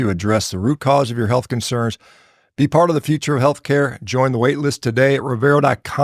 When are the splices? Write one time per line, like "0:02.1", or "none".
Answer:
none

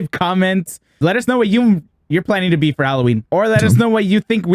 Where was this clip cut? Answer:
0:01.0
0:03.2

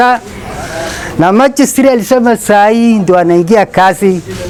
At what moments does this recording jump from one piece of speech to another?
none

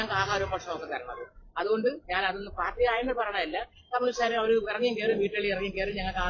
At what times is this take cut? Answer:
none

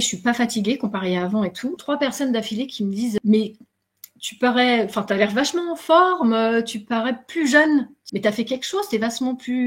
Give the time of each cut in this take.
0:01.7
0:08.0

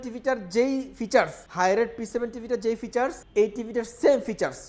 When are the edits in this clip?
0:01.4
0:03.2

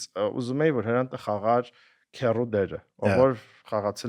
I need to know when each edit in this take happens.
none

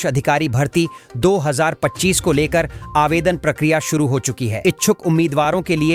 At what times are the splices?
none

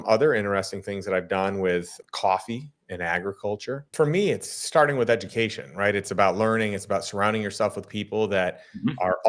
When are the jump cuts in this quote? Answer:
0:02.0
0:03.8

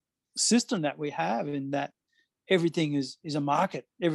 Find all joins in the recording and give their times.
none

